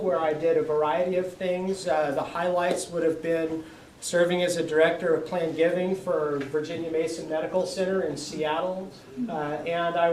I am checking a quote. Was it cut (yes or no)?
no